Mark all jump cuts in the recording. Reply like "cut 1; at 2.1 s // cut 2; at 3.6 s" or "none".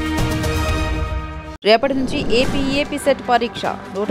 cut 1; at 1.4 s

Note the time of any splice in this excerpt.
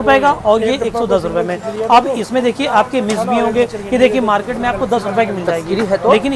none

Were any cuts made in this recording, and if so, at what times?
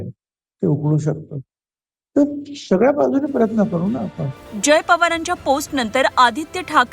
none

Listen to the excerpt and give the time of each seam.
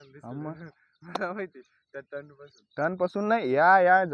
none

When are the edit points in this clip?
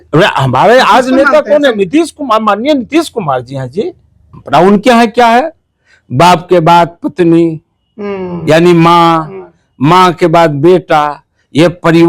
cut 1; at 4.3 s

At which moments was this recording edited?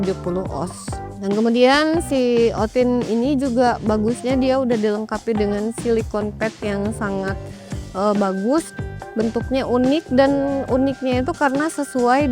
cut 1; at 1.1 s

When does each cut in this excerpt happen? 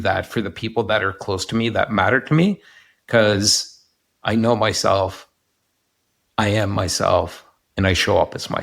none

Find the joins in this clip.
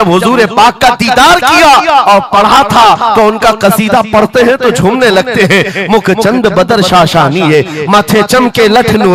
none

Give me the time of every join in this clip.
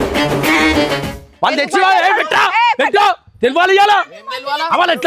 cut 1; at 1.2 s

